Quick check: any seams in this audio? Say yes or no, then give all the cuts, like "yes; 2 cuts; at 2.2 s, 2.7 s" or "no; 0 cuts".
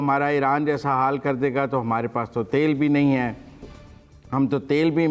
no; 0 cuts